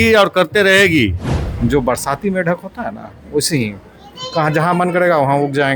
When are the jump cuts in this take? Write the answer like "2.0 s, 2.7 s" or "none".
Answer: 1.2 s

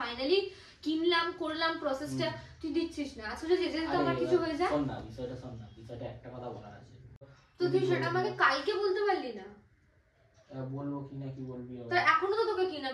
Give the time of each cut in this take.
7.4 s

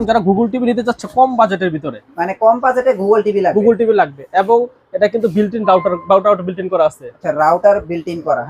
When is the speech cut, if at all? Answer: none

